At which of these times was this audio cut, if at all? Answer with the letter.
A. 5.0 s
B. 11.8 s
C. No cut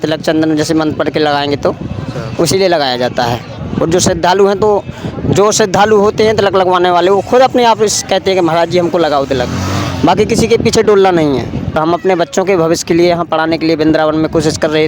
B